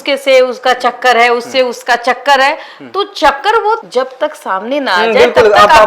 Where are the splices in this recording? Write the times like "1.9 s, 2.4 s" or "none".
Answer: none